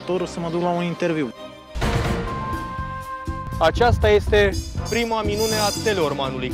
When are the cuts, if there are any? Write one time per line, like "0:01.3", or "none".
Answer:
0:01.3
0:02.3

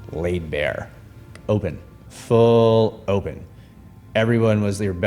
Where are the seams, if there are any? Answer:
0:01.4

